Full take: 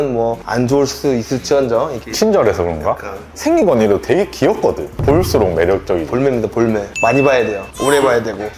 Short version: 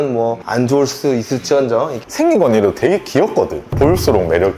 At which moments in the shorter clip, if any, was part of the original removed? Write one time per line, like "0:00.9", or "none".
0:02.0